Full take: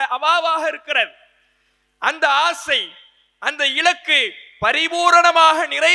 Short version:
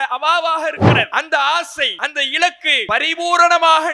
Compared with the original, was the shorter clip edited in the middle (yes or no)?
yes